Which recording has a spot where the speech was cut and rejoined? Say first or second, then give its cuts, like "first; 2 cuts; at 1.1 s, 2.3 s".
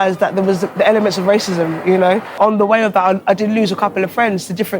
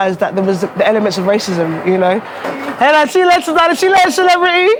first; 1 cut; at 2.4 s